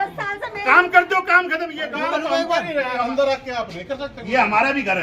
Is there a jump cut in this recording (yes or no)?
yes